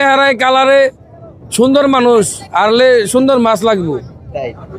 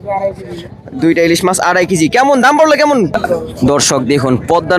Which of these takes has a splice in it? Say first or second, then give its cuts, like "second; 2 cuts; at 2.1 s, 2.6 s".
second; 1 cut; at 3.2 s